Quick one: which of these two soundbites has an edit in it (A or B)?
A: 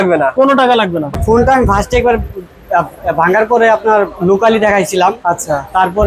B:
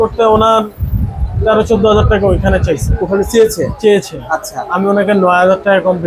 A